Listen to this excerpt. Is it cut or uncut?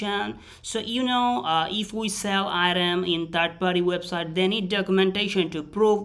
uncut